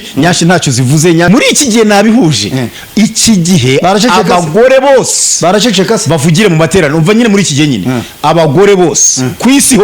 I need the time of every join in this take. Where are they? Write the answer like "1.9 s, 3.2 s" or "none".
1.3 s